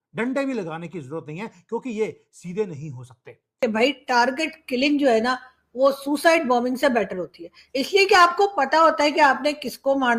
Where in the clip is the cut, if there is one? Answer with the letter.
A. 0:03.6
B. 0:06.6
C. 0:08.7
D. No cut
A